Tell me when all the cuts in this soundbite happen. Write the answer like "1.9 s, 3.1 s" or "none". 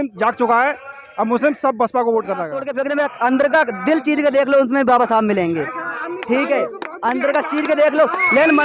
2.6 s

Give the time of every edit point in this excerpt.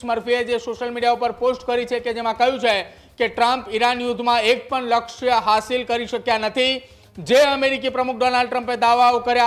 none

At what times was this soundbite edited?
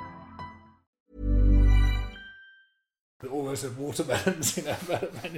none

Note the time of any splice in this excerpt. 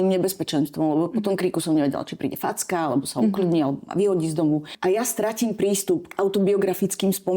4.7 s

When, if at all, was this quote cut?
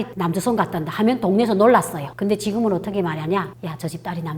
2.0 s

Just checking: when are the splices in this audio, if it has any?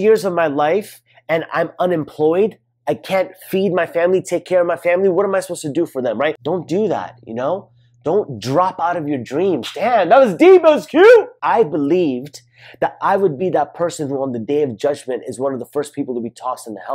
6.4 s, 11.3 s

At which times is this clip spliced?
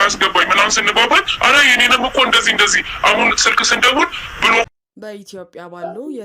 4.7 s

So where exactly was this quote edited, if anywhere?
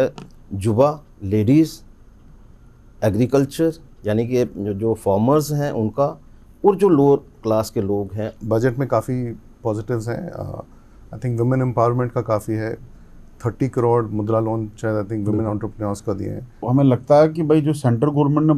1.1 s, 8.3 s, 16.7 s

